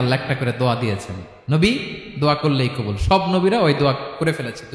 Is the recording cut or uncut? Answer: uncut